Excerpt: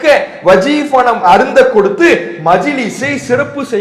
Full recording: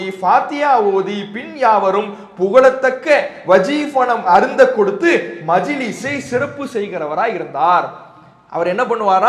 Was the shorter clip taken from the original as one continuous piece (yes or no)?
yes